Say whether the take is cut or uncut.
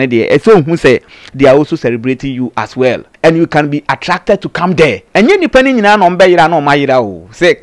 cut